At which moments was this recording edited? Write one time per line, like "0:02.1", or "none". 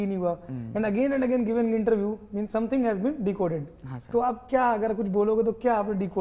none